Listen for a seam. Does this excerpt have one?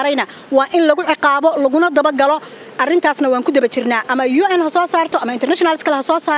no; 0 cuts

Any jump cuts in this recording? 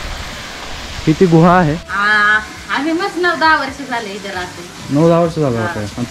yes; 1 cut; at 1.9 s

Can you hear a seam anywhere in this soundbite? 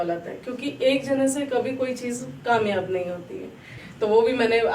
yes; 1 cut; at 3.8 s

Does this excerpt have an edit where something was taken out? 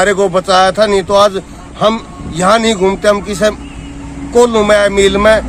no; 0 cuts

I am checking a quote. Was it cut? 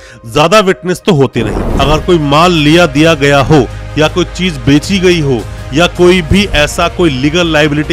yes; 1 cut; at 1.7 s

